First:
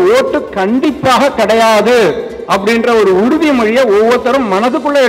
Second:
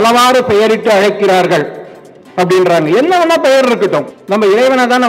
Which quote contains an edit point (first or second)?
second